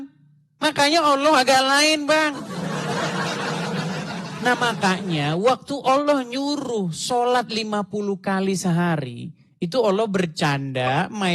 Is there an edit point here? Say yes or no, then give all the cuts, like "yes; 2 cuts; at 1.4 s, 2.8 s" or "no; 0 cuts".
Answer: no; 0 cuts